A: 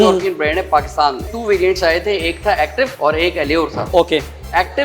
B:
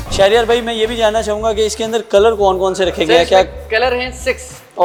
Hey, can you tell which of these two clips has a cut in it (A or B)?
A